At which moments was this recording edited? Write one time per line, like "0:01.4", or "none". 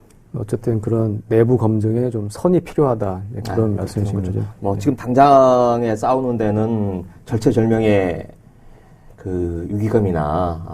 0:02.8